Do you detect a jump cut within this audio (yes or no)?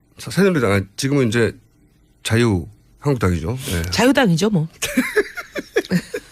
yes